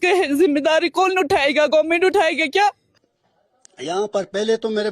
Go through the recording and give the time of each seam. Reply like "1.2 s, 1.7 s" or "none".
2.9 s